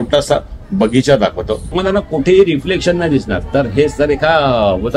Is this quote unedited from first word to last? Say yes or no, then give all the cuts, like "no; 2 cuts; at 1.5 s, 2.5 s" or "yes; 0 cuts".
no; 1 cut; at 1.7 s